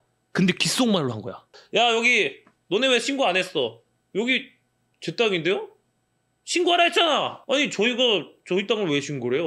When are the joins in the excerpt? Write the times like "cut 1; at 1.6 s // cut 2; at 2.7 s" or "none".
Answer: cut 1; at 1.5 s